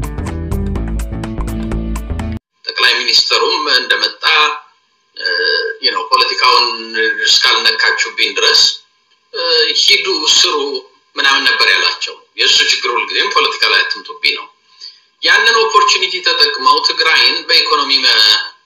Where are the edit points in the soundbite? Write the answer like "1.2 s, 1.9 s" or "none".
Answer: 2.4 s